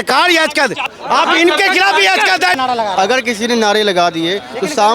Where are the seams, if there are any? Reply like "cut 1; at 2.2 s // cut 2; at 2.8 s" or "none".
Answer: cut 1; at 1.0 s // cut 2; at 2.6 s